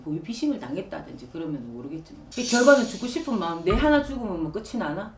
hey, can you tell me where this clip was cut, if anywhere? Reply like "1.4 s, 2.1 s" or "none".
2.2 s